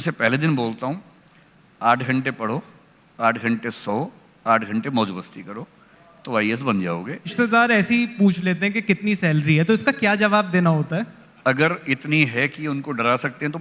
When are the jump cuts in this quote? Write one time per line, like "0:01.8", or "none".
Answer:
0:07.3
0:11.2